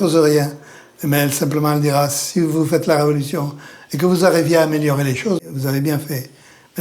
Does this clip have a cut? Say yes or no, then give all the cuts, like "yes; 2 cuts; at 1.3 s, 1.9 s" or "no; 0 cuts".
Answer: yes; 1 cut; at 5.4 s